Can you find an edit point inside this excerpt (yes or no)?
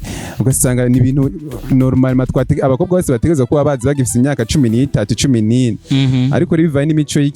no